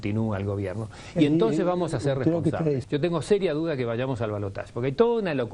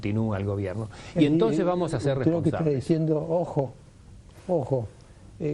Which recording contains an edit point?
first; 1 cut; at 2.8 s

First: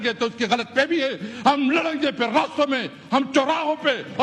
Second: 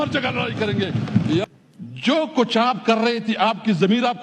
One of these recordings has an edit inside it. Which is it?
second; 1 cut; at 1.4 s

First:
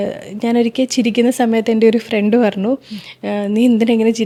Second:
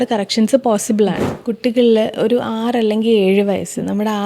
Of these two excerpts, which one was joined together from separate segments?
second; 1 cut; at 1.3 s

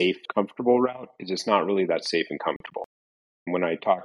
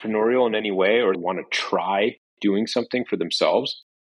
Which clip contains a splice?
second; 1 cut; at 1.2 s

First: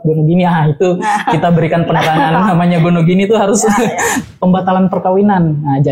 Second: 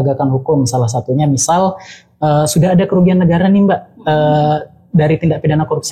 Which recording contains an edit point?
first; 1 cut; at 4.1 s

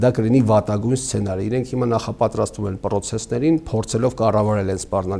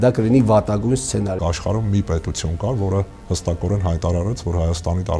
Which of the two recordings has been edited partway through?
second; 1 cut; at 1.4 s

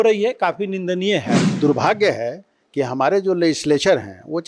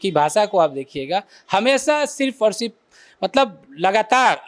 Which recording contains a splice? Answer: first; 1 cut; at 1.4 s

